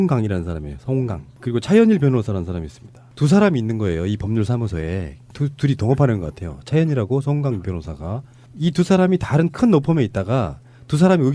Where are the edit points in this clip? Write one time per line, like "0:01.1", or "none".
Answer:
0:09.3